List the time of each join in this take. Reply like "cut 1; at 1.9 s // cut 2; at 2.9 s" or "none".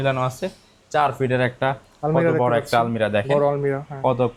none